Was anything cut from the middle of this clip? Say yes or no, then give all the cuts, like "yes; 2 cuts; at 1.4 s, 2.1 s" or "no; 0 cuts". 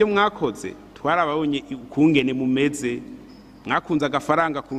no; 0 cuts